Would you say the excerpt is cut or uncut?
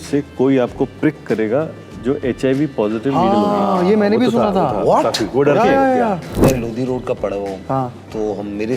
cut